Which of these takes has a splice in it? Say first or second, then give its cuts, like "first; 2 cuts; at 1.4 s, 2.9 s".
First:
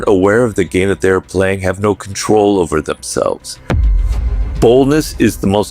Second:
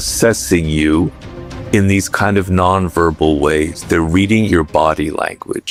first; 1 cut; at 3.9 s